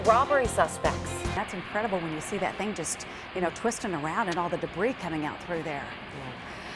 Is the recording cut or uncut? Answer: cut